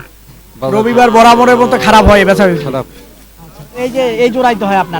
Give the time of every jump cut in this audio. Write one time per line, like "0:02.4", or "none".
none